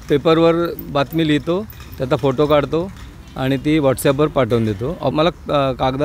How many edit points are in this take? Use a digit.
1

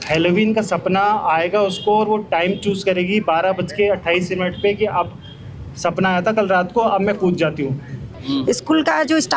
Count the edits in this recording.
1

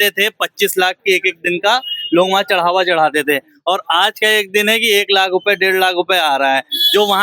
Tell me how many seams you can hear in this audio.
0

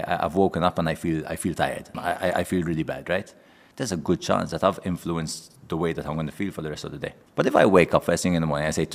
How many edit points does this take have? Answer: 2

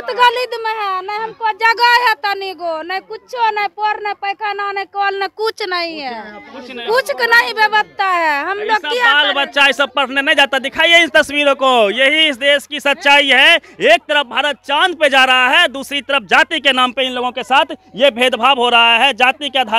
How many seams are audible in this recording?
0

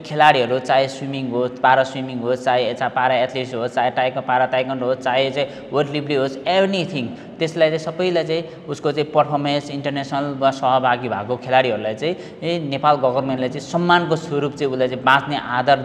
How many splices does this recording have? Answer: 0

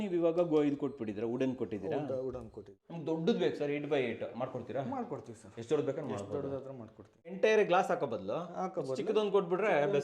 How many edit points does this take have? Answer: 2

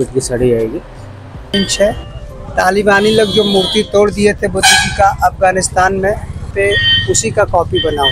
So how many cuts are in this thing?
2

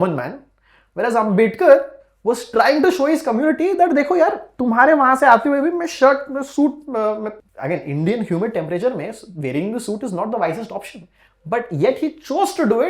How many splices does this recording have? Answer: 1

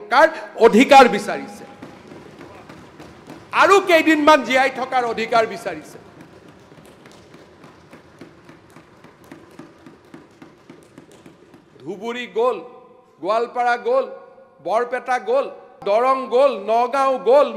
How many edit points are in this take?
1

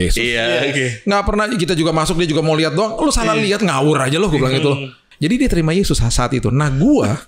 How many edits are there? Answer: 1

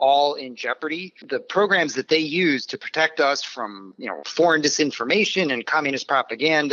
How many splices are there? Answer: 2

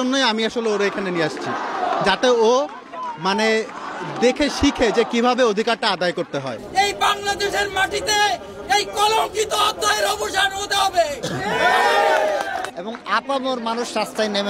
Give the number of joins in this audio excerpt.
2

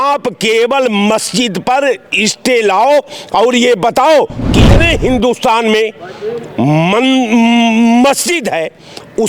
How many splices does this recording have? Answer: 1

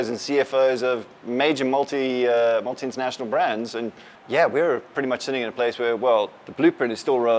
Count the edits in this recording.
1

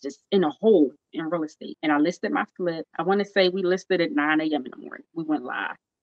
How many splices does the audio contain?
2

